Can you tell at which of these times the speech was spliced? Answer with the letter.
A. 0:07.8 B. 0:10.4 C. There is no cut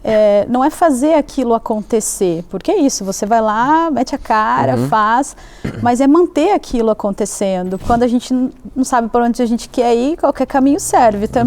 A